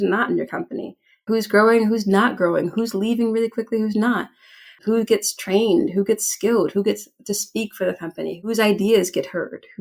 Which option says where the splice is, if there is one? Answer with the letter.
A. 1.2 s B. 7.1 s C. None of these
A